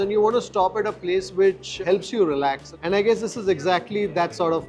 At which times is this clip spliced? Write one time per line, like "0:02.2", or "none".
none